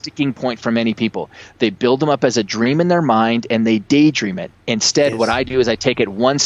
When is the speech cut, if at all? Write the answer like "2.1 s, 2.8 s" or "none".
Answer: none